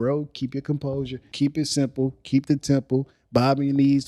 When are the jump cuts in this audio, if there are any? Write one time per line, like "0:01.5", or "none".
0:01.3